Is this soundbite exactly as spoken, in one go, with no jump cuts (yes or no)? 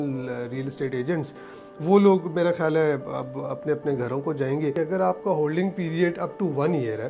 no